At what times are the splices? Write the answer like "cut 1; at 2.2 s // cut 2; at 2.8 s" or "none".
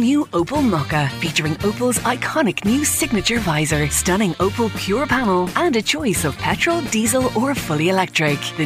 none